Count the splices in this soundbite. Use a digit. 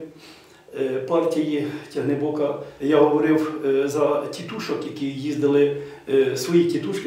1